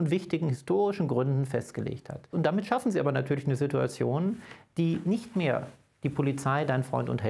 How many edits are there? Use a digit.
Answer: 1